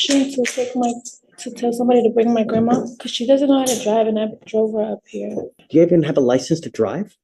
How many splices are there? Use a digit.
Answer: 2